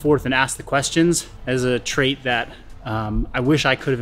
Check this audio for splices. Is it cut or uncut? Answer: cut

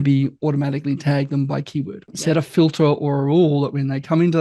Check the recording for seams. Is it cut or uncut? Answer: cut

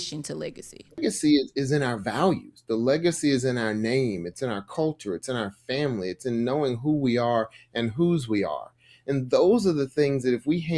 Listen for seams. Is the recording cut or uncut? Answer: cut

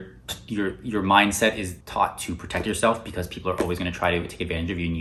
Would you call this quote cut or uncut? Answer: uncut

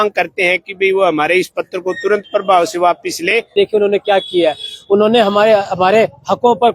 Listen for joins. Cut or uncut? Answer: cut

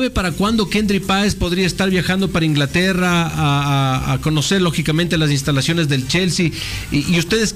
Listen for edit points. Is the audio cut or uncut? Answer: uncut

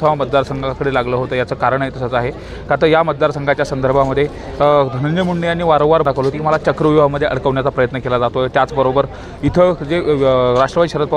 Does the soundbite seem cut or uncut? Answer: cut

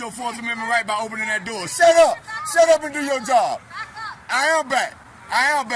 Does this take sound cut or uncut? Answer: uncut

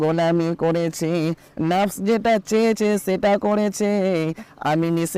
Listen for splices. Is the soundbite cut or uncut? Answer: uncut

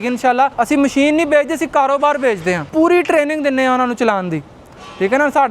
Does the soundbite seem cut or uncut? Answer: uncut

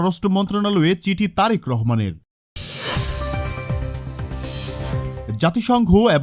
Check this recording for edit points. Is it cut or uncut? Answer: uncut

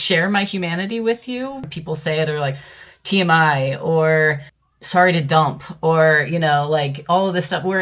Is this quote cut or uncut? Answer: cut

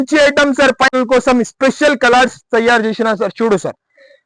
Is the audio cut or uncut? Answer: cut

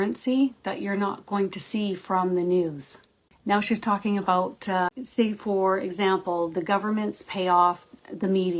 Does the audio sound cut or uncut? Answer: cut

